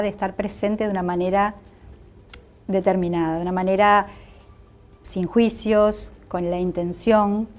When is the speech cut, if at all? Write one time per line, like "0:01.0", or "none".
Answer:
0:04.1